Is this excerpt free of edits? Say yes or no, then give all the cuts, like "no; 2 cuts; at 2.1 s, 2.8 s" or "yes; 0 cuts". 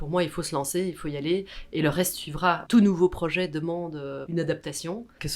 no; 2 cuts; at 2.6 s, 4.2 s